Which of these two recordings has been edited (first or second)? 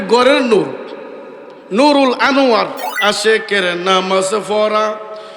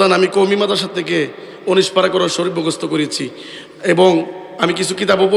first